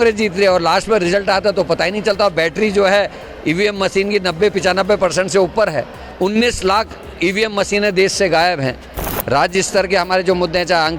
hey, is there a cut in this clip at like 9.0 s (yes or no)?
yes